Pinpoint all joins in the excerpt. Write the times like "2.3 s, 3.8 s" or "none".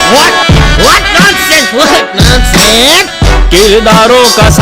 3.1 s